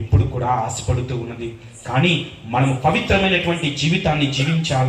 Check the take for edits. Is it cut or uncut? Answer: uncut